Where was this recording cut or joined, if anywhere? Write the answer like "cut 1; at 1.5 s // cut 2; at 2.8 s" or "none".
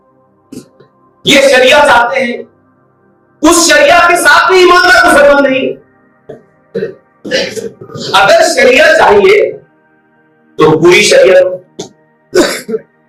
none